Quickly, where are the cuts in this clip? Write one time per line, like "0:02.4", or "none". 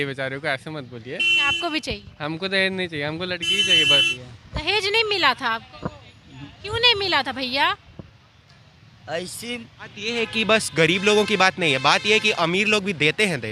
0:04.1
0:09.9